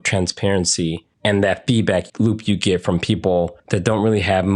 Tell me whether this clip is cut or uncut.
cut